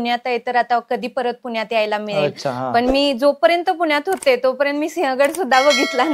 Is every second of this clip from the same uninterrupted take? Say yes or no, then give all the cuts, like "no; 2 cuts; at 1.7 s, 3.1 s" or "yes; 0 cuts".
yes; 0 cuts